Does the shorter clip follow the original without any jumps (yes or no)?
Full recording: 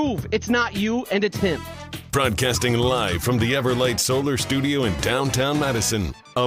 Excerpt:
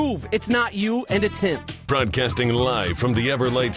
no